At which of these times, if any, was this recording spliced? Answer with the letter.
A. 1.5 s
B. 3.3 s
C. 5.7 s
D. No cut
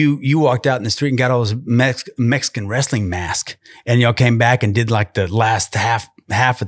D